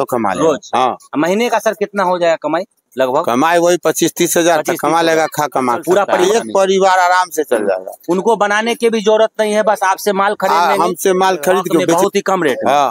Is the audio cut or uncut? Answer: cut